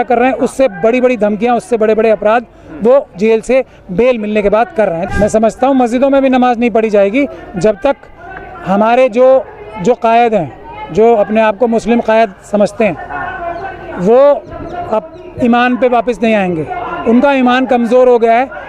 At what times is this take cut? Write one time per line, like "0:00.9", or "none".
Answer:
0:05.0